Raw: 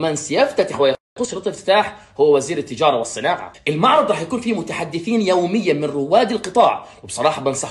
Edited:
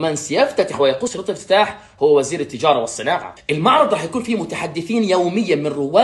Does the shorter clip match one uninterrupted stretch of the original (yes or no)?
no